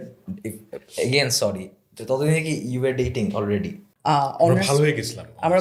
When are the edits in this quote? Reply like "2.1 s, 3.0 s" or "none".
3.8 s

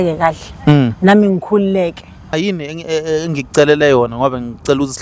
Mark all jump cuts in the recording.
2.3 s

